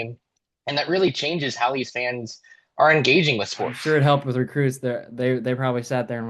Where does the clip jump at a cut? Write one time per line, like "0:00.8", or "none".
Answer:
0:03.8